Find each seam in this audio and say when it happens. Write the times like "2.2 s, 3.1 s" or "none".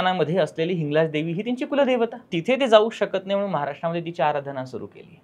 2.2 s